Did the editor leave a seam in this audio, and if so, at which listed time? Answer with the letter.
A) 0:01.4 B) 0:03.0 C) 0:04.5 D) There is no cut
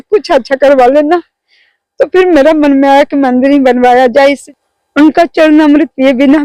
C